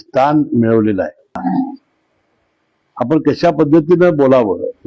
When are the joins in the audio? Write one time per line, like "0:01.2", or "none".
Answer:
0:01.4